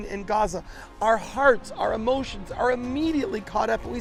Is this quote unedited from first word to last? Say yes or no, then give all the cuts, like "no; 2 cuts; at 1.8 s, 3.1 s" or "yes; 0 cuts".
yes; 0 cuts